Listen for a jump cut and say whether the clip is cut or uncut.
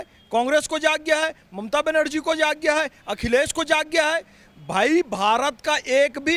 uncut